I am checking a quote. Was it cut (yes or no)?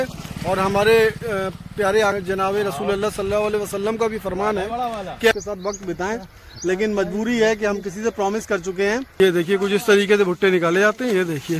yes